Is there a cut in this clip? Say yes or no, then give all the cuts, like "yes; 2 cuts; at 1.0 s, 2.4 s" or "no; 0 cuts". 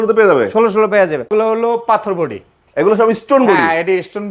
yes; 1 cut; at 1.3 s